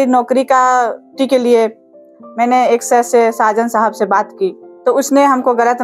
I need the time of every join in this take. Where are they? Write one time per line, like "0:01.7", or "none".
0:01.1
0:04.7